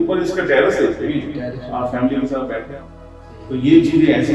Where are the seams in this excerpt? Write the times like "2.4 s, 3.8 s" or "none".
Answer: 2.8 s

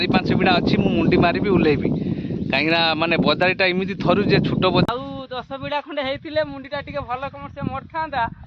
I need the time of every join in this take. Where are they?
4.9 s

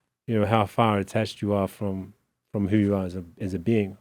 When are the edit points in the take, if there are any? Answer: none

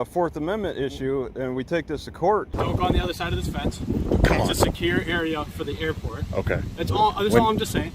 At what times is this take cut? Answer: 2.5 s

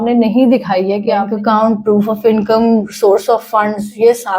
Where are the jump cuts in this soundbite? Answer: 1.3 s

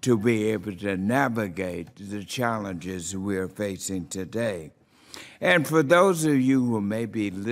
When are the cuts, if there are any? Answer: 4.0 s

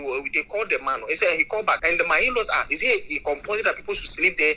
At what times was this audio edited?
1.8 s

